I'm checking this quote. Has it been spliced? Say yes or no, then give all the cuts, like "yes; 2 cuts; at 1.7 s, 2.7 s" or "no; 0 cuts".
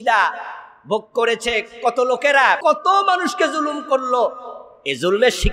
yes; 1 cut; at 2.6 s